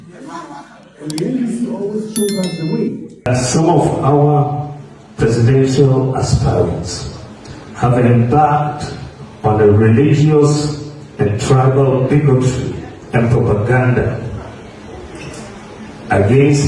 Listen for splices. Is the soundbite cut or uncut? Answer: cut